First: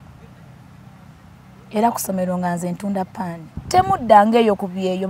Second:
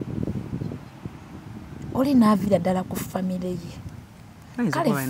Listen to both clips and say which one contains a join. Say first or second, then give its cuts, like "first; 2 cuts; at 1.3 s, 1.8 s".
first; 1 cut; at 3.5 s